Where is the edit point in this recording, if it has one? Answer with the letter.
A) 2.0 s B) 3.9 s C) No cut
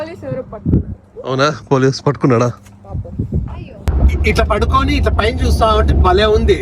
B